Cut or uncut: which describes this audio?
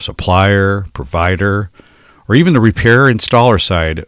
uncut